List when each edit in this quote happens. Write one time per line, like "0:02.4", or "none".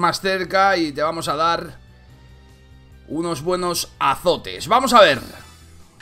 0:03.9